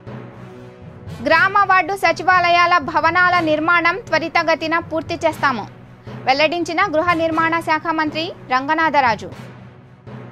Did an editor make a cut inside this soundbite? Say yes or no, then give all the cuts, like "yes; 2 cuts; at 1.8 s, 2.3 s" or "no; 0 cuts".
no; 0 cuts